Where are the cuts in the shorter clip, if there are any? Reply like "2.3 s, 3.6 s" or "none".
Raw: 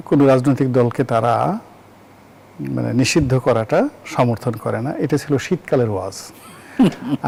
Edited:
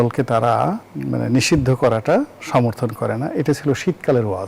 0.9 s